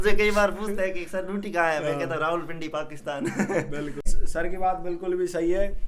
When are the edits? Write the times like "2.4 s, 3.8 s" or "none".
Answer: 4.1 s